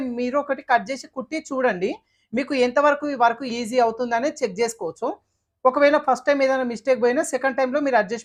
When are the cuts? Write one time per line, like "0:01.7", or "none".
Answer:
none